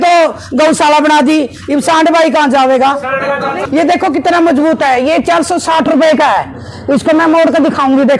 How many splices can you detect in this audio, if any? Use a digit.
1